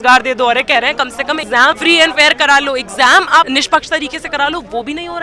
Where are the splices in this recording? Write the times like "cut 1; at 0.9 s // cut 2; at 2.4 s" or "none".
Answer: cut 1; at 1.5 s // cut 2; at 3.5 s